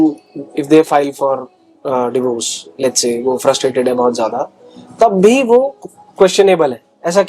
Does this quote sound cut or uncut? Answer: uncut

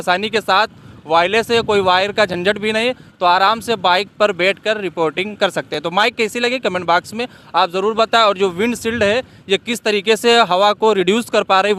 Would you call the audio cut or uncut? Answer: uncut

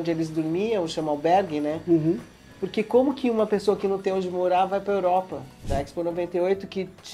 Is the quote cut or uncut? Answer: cut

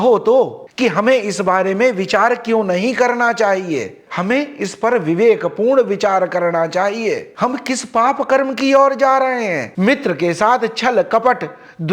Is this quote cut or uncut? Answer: cut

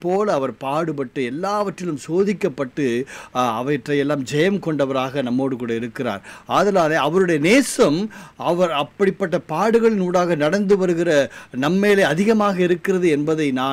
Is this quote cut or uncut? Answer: uncut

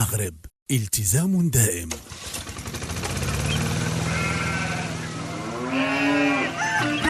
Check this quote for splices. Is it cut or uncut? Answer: cut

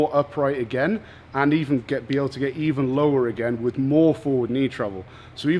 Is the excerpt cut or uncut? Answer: uncut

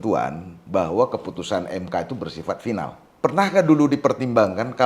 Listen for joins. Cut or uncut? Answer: cut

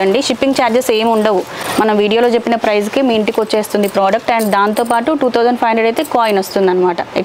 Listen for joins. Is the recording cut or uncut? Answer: uncut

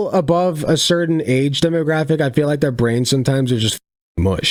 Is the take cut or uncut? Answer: uncut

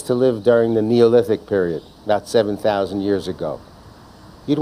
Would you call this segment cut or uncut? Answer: cut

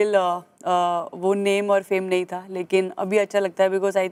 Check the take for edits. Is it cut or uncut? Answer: uncut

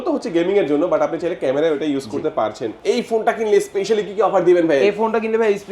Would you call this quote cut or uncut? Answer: cut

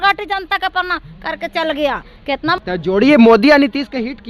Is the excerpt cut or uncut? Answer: cut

